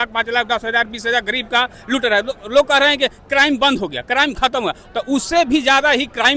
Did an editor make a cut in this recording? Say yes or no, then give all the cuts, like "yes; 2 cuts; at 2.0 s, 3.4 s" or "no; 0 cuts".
no; 0 cuts